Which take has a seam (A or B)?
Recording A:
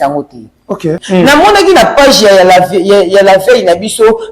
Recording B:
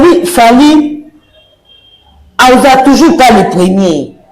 A